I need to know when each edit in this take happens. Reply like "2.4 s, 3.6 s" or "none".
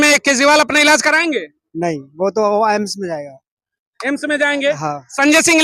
none